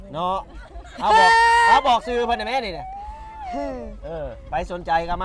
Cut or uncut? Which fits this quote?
uncut